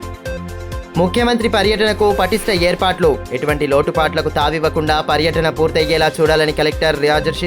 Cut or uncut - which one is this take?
uncut